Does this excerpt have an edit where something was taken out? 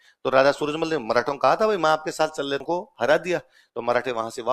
yes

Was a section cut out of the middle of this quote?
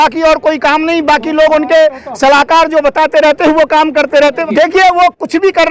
yes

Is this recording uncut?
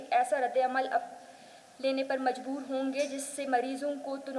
yes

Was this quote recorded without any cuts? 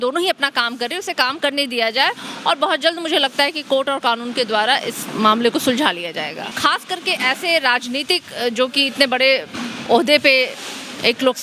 no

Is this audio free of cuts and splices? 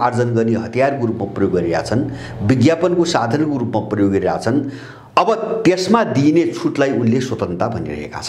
yes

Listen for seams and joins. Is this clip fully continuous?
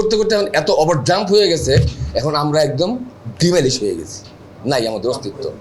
yes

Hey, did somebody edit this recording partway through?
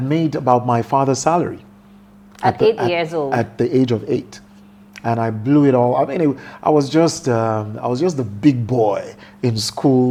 no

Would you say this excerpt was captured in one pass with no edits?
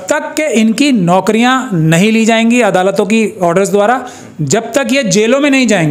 yes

